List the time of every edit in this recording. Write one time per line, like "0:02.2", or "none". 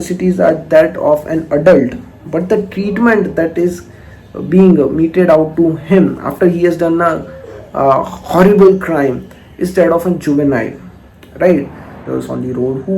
0:12.0